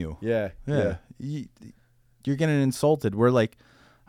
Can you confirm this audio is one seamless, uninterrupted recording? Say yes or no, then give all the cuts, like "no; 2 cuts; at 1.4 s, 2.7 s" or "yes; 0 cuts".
yes; 0 cuts